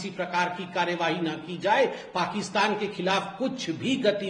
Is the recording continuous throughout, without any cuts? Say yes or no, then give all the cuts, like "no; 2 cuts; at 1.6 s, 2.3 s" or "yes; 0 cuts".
yes; 0 cuts